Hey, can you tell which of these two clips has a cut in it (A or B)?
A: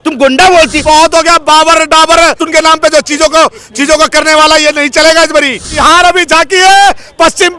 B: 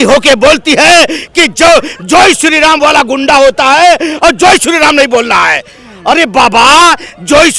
A